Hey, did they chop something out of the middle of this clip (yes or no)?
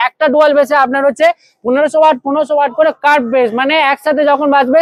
no